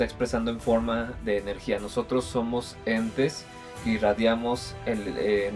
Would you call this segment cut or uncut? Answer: uncut